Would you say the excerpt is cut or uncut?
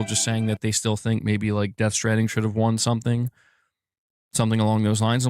uncut